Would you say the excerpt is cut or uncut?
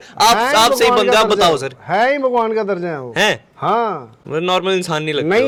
uncut